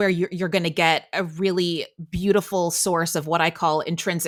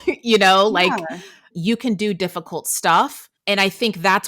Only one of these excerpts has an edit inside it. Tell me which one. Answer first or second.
second